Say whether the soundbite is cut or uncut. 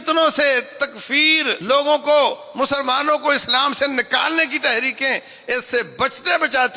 cut